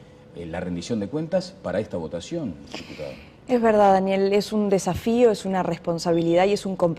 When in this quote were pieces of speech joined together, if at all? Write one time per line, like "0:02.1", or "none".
0:03.9